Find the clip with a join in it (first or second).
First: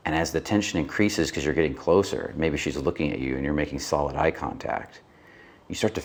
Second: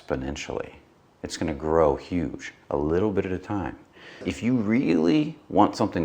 second